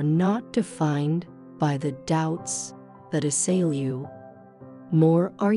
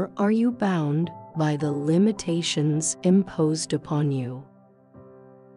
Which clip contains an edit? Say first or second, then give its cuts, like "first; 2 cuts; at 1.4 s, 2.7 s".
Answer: second; 1 cut; at 4.5 s